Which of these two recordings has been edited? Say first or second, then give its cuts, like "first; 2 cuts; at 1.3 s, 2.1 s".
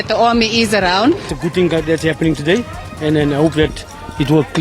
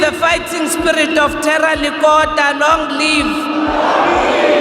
first; 1 cut; at 1.3 s